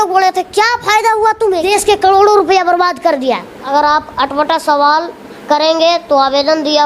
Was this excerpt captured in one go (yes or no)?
no